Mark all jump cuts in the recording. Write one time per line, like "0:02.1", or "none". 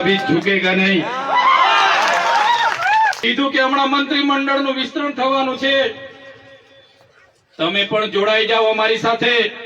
0:03.2